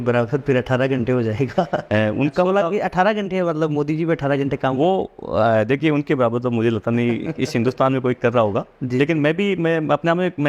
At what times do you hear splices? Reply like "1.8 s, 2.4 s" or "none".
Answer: none